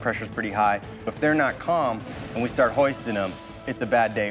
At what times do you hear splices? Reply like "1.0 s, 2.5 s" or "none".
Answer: 1.1 s